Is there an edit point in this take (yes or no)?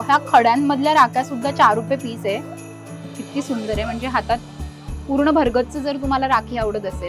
no